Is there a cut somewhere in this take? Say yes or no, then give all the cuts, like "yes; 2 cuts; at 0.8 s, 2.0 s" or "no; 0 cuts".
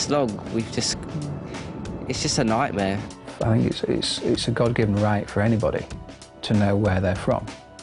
yes; 1 cut; at 3.2 s